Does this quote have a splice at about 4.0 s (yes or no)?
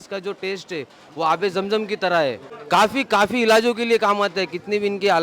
no